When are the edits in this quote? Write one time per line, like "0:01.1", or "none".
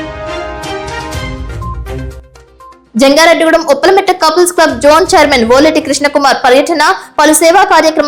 none